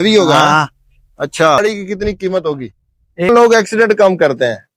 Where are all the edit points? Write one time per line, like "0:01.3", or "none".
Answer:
0:01.6
0:03.3